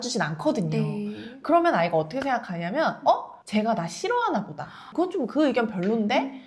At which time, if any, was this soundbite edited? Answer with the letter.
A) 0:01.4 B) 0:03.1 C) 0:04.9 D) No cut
C